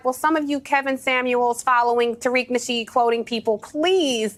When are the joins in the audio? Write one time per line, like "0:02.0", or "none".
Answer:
none